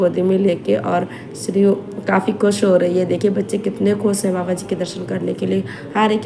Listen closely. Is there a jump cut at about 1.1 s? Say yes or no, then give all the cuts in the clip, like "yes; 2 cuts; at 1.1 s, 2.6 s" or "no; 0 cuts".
no; 0 cuts